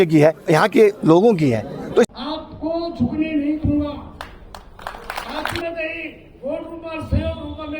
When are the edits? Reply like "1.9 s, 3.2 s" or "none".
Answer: 2.1 s, 5.6 s